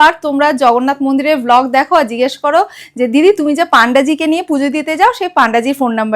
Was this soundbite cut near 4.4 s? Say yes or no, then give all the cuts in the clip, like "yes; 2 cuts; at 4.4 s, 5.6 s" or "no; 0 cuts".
no; 0 cuts